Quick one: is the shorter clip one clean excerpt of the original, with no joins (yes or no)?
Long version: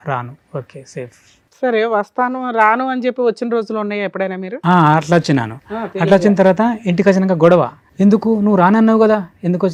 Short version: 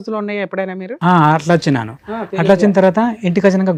yes